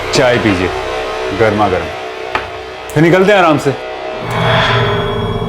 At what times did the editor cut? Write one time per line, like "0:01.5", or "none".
0:04.3